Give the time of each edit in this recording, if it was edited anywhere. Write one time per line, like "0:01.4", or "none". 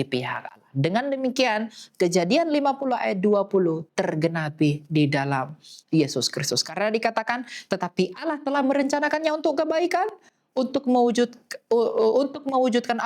none